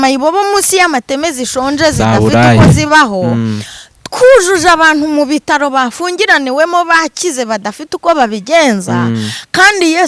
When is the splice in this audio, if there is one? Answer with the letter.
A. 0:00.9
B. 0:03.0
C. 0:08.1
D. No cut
D